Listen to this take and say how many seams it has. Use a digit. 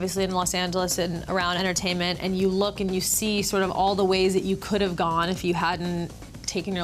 1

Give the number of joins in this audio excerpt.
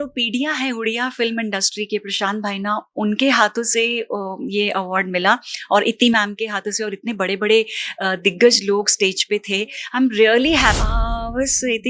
1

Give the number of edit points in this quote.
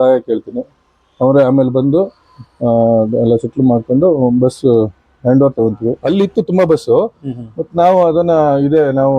1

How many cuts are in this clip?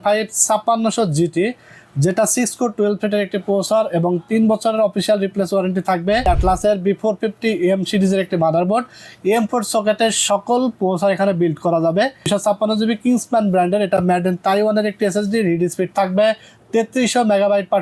2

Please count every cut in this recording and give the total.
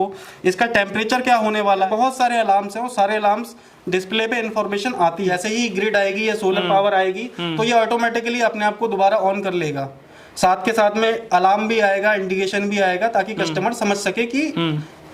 2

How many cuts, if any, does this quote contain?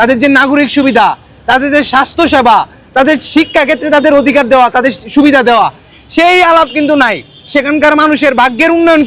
0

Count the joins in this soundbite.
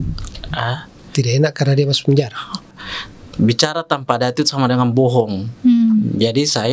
1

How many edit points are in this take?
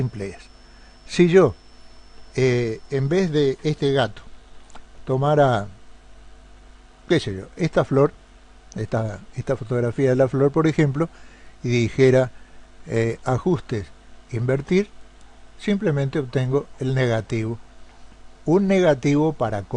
1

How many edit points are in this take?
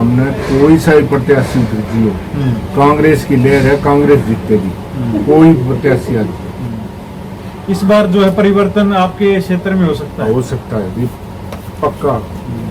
0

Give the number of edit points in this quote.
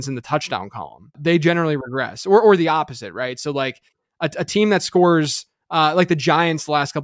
1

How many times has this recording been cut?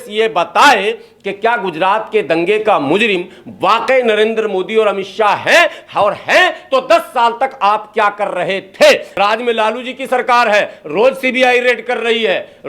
1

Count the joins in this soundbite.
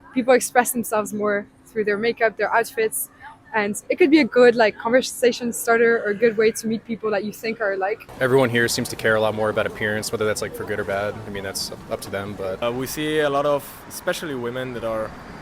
2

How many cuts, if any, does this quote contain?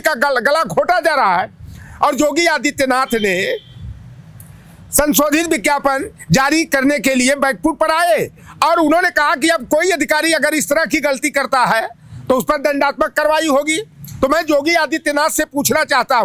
0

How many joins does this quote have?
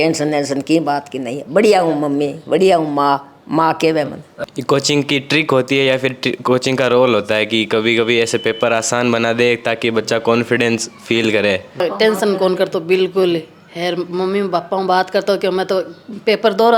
2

